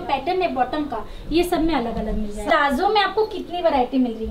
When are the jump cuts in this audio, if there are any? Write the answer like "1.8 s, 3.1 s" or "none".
2.4 s